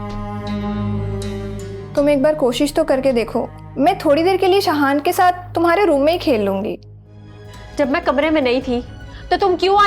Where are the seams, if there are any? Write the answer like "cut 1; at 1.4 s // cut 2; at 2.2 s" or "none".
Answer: cut 1; at 1.8 s // cut 2; at 7.0 s